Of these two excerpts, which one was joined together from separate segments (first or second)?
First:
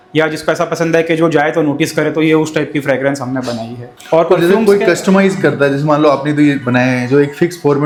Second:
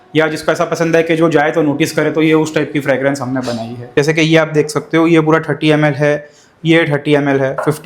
second